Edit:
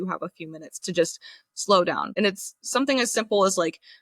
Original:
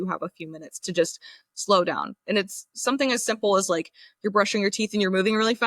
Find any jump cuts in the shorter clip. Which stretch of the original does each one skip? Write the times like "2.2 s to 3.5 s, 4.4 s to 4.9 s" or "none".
2.1 s to 2.2 s